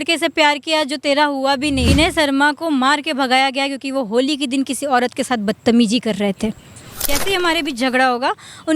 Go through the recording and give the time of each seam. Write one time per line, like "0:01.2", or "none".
0:01.9
0:07.1